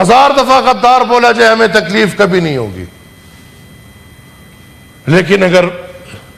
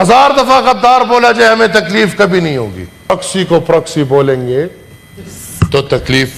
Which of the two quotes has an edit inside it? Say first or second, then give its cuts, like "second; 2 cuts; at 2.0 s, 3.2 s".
second; 1 cut; at 3.1 s